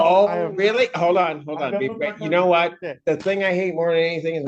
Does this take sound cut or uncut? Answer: uncut